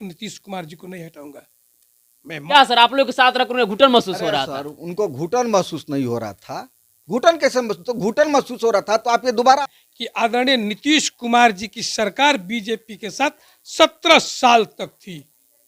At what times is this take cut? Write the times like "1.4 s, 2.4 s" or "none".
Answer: 2.5 s, 9.6 s